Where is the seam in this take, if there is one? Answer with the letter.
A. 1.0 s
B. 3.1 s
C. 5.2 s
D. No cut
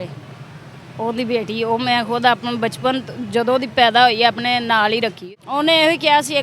C